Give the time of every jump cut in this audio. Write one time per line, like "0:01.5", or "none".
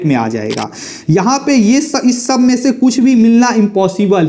none